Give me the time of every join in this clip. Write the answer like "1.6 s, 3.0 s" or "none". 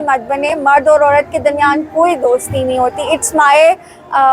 none